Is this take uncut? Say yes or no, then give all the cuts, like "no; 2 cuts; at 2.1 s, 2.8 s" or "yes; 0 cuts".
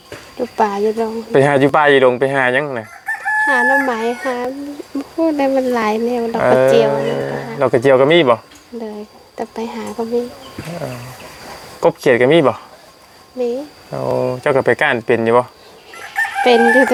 yes; 0 cuts